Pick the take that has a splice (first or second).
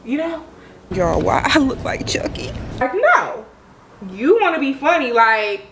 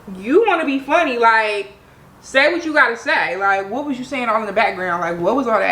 first